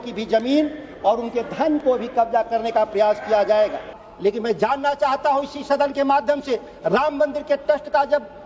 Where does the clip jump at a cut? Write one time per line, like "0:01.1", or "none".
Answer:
0:04.0

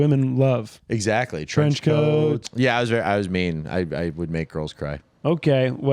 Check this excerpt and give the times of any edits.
0:02.5

